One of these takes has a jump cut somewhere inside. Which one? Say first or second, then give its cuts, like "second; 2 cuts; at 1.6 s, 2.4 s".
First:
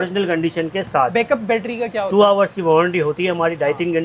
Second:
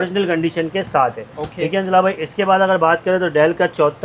first; 1 cut; at 1.1 s